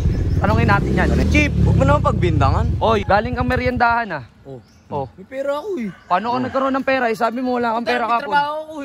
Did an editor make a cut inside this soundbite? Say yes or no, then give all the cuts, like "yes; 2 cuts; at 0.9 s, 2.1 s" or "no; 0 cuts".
yes; 2 cuts; at 1.2 s, 3.0 s